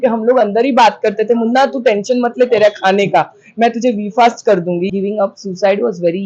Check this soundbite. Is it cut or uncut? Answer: cut